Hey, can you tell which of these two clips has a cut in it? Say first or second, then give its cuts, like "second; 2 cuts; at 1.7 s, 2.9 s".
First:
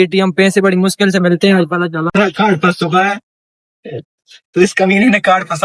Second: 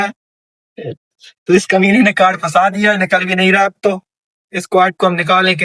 first; 1 cut; at 2.1 s